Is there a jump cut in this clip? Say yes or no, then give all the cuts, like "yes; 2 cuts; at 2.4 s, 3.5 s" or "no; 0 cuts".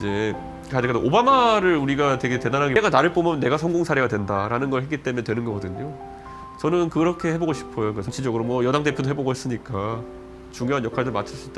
yes; 2 cuts; at 2.8 s, 8.1 s